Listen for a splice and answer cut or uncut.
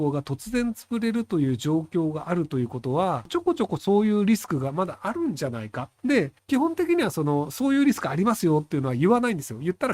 cut